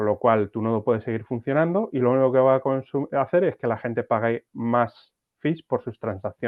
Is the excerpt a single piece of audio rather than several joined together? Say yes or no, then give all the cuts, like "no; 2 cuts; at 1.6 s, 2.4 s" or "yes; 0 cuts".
yes; 0 cuts